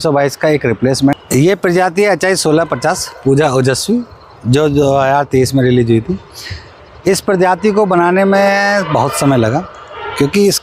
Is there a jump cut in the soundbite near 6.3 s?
no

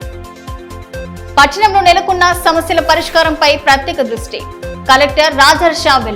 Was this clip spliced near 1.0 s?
yes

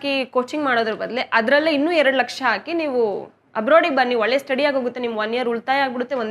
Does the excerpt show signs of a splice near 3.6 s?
no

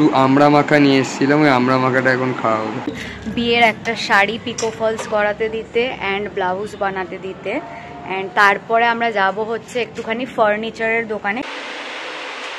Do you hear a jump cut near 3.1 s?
yes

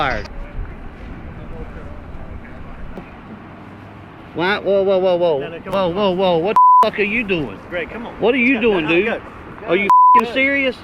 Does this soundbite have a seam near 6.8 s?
no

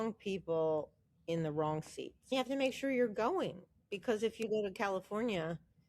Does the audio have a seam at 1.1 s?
no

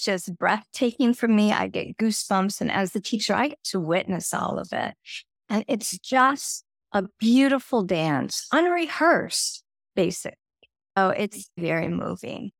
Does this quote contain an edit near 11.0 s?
yes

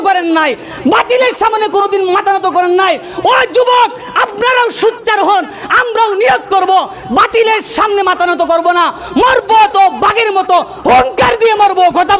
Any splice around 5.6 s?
no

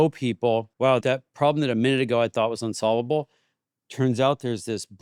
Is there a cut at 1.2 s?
yes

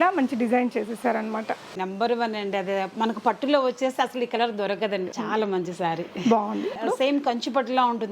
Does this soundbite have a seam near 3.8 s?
no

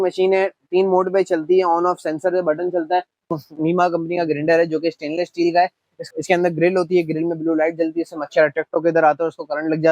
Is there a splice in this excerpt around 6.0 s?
yes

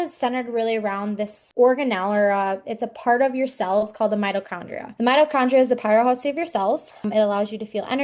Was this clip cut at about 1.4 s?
yes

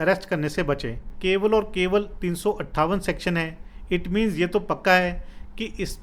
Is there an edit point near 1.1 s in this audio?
yes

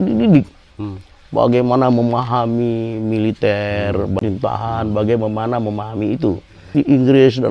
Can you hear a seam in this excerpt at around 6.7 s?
yes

